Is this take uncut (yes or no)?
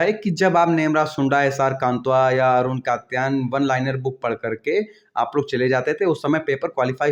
yes